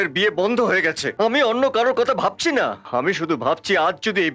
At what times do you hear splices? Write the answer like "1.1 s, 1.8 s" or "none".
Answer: 1.1 s, 2.8 s